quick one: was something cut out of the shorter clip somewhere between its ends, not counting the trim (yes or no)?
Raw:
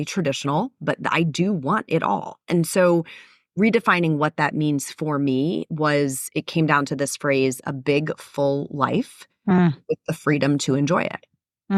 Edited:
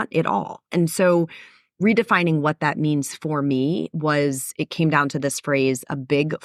no